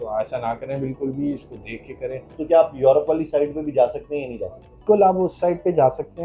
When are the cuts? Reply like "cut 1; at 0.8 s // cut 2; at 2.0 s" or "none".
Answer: cut 1; at 2.3 s // cut 2; at 4.8 s